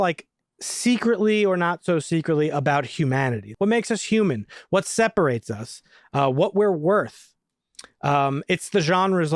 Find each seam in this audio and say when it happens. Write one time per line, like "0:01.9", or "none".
0:03.4